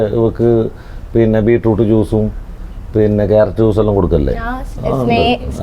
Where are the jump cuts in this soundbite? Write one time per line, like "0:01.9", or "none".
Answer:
none